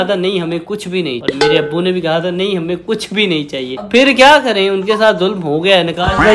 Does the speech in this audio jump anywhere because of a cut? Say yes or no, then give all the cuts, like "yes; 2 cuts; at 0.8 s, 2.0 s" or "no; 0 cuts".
no; 0 cuts